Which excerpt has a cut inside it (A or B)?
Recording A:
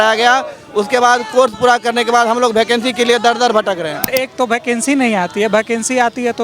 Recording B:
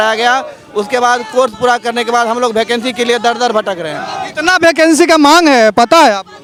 A